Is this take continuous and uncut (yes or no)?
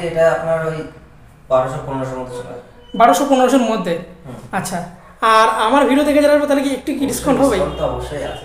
yes